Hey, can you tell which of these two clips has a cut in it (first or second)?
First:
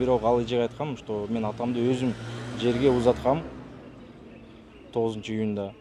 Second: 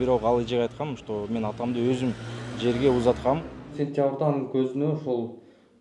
second